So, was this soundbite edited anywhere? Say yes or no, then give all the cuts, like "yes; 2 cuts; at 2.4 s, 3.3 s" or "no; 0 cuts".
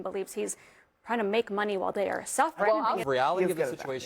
yes; 1 cut; at 3.0 s